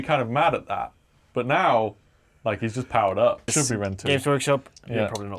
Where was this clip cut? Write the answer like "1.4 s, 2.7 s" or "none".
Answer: 3.5 s